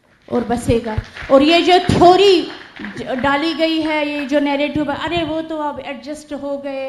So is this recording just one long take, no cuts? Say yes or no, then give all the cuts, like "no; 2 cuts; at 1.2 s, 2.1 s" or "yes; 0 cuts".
yes; 0 cuts